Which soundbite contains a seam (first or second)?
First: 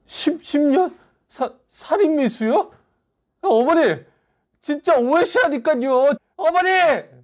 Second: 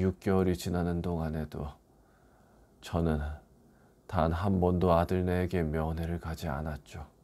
first